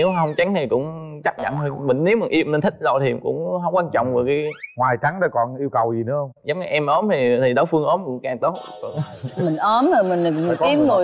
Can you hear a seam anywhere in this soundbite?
no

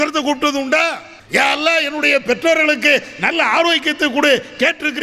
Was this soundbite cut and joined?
yes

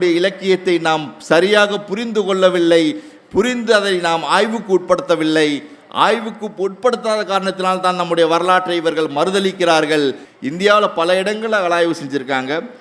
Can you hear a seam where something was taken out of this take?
yes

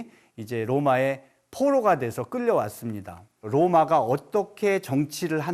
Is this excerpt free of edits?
no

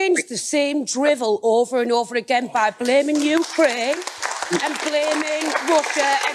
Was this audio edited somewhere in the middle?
no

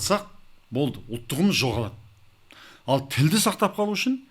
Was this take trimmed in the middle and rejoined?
no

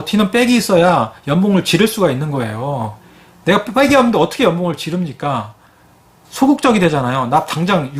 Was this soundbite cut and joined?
no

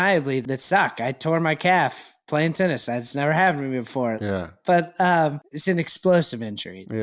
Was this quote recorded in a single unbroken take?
no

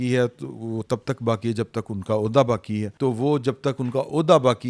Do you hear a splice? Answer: no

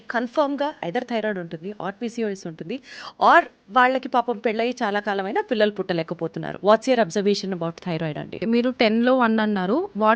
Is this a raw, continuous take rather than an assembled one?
no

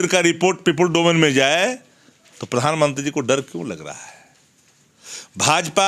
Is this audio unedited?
yes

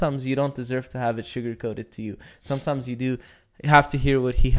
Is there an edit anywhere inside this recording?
no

